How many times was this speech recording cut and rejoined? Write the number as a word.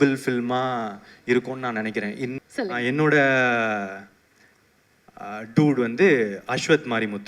one